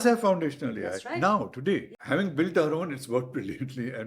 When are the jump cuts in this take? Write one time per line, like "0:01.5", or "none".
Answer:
0:01.9